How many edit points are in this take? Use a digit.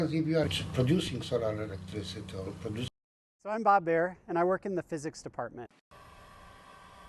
2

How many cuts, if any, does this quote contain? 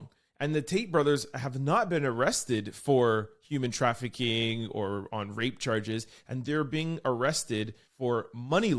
1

